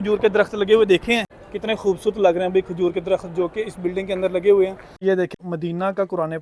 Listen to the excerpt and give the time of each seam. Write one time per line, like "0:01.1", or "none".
0:01.4
0:05.1